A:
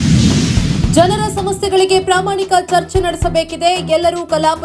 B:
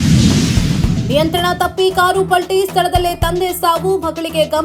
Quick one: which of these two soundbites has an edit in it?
A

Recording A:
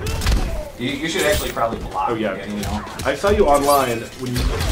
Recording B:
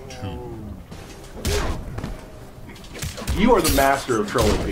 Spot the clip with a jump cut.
A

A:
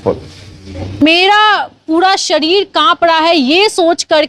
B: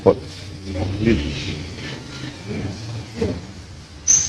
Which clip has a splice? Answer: A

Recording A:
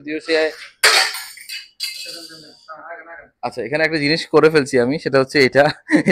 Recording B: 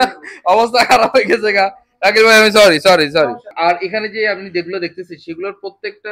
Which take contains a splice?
B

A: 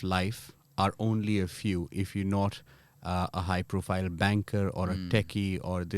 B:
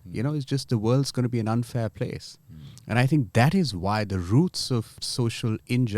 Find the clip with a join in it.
B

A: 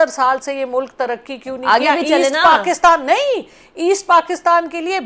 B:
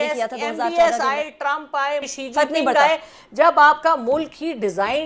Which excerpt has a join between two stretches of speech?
B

